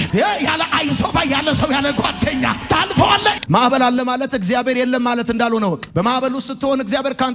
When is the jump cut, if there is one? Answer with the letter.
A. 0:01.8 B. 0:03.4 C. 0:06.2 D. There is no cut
B